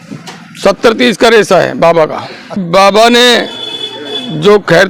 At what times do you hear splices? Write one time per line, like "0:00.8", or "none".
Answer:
0:02.6